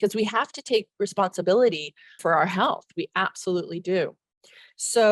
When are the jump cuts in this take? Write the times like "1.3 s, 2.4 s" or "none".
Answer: none